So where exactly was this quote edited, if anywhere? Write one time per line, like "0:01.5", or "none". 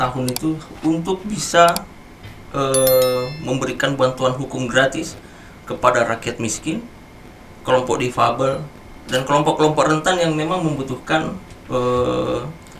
none